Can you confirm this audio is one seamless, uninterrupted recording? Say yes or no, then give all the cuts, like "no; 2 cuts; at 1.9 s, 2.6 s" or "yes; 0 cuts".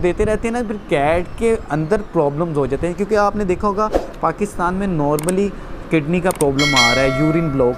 yes; 0 cuts